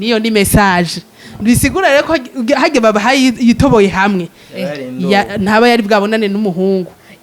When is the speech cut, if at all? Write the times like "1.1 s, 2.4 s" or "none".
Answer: none